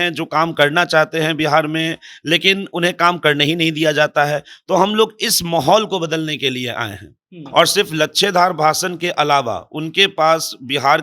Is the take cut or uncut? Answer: cut